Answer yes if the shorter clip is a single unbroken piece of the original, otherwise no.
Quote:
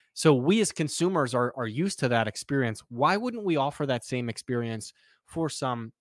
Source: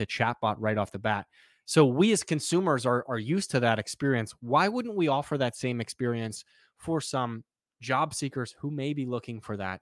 yes